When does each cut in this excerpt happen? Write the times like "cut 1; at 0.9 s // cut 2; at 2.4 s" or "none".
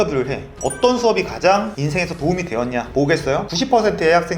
none